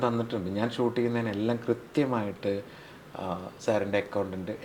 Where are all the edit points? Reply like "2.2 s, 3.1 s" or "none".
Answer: none